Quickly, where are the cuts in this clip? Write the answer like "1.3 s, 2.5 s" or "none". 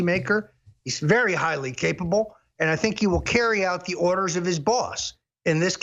none